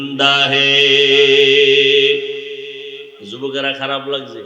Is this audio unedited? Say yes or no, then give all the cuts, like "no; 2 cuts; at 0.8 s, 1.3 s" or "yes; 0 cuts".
yes; 0 cuts